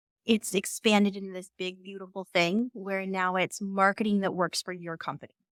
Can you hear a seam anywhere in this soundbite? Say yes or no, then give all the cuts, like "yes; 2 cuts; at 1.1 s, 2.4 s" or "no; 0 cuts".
no; 0 cuts